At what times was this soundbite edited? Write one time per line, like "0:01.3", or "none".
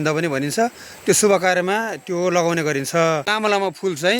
0:03.3

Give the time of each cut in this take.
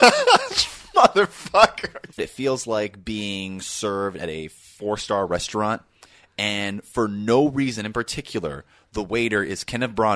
0:02.3

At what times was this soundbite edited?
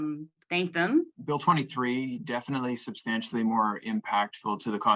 0:01.1

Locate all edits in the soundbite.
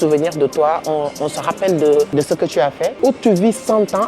0:02.4

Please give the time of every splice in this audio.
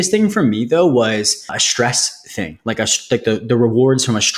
0:01.6

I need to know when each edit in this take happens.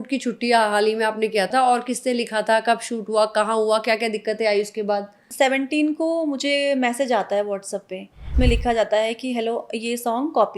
0:01.5
0:05.2
0:08.3

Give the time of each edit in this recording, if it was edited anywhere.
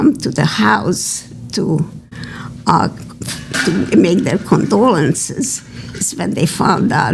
none

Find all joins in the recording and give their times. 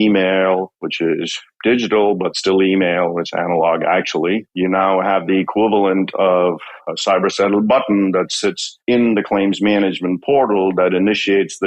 0:04.5

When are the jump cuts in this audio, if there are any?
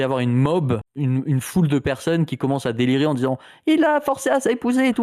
0:00.9

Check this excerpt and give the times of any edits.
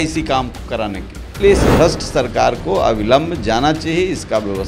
0:01.3

